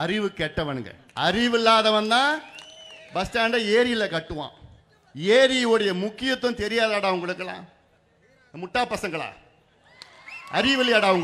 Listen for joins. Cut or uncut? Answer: cut